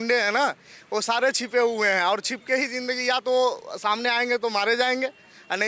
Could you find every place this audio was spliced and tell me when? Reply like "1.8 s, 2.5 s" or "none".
none